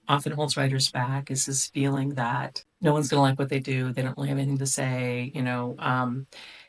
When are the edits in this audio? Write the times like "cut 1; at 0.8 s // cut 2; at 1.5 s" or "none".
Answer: cut 1; at 2.6 s